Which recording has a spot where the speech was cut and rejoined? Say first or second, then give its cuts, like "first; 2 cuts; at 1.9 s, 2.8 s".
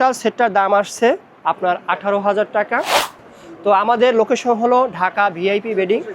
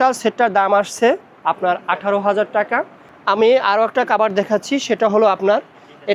first; 1 cut; at 3.1 s